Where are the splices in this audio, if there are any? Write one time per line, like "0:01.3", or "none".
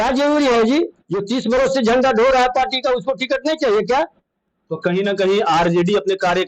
none